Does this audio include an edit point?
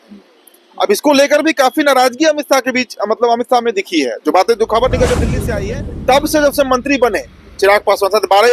yes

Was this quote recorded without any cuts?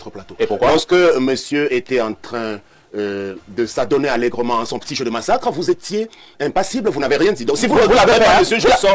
yes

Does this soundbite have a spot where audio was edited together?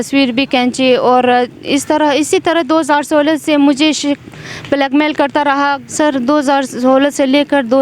yes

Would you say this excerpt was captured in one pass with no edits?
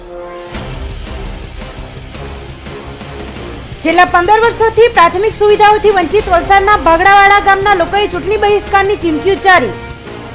no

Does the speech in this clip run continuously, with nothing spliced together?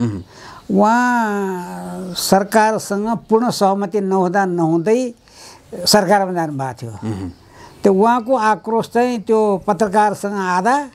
yes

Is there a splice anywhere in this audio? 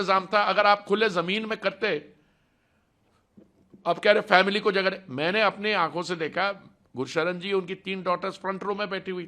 no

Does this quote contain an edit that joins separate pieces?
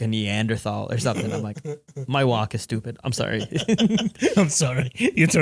no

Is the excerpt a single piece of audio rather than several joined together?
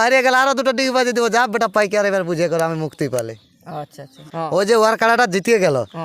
no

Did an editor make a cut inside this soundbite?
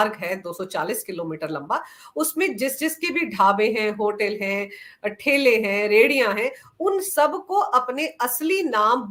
no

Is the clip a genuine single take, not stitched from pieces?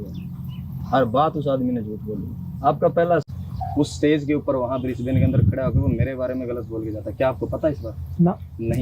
no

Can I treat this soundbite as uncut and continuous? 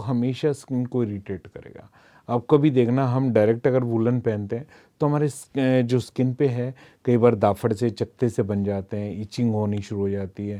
yes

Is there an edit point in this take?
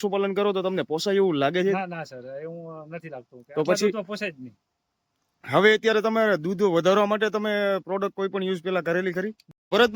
no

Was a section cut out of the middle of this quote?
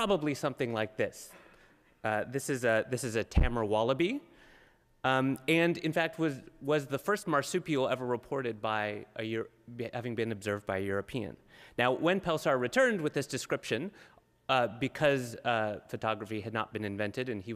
no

